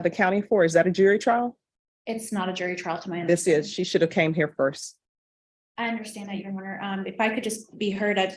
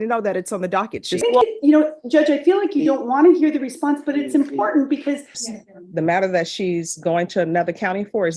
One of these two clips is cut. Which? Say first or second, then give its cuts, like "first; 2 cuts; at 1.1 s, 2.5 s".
second; 2 cuts; at 1.2 s, 5.4 s